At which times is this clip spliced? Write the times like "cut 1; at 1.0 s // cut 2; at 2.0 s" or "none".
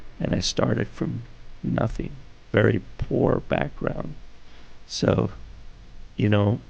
cut 1; at 2.5 s